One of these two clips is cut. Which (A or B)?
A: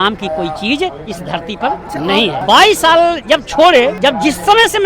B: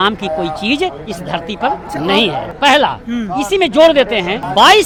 A